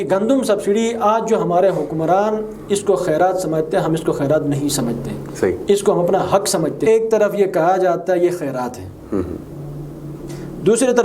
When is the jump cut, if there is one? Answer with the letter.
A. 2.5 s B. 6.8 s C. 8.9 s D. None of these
B